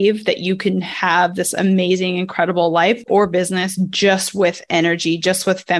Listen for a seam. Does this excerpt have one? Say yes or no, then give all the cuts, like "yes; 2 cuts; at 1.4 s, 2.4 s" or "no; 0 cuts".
no; 0 cuts